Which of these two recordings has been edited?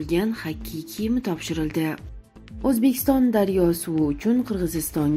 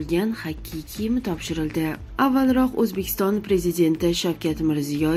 first; 1 cut; at 2.1 s

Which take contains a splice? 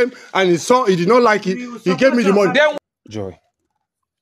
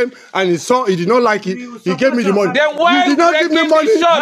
first; 1 cut; at 2.7 s

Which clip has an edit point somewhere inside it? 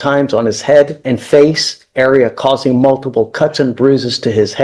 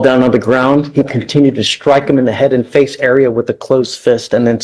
first; 1 cut; at 1.0 s

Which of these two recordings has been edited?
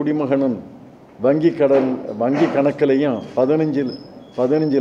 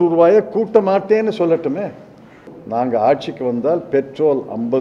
second; 1 cut; at 2.6 s

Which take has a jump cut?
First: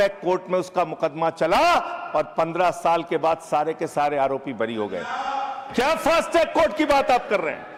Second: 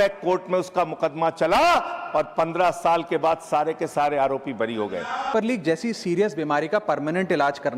second; 1 cut; at 5.3 s

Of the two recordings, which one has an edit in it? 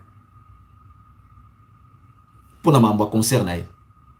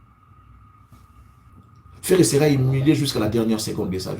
second; 1 cut; at 1.5 s

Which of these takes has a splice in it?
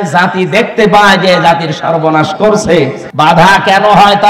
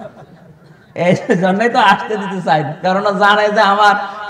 first; 1 cut; at 3.0 s

